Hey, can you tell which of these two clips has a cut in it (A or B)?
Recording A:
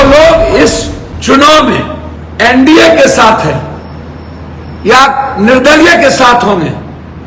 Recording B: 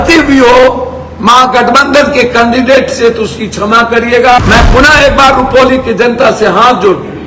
B